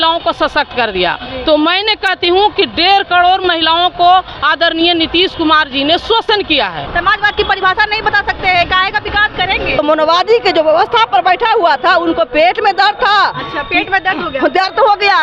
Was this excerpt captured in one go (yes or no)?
no